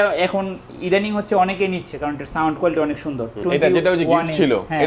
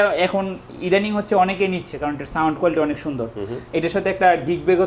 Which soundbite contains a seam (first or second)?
first